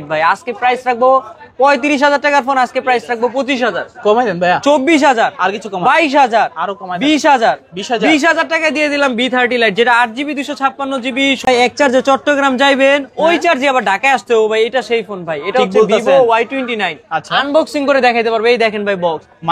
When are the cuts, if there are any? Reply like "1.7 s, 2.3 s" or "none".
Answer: 11.5 s